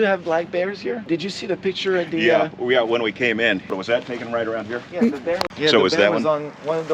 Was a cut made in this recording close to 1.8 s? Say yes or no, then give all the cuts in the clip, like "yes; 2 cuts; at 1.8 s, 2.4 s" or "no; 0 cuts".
no; 1 cut; at 3.7 s